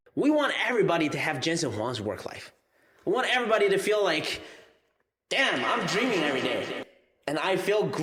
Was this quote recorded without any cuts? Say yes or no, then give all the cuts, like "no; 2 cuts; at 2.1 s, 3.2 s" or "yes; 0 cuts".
yes; 0 cuts